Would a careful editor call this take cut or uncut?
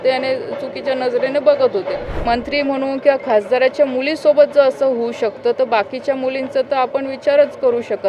cut